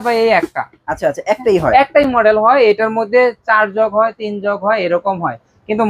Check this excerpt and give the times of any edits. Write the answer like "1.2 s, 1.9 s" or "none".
none